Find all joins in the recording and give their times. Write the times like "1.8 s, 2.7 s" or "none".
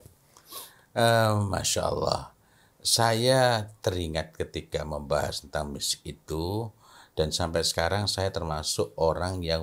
none

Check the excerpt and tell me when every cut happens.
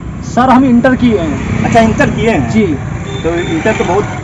none

